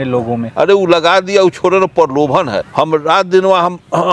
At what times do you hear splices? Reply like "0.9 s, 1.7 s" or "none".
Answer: 2.7 s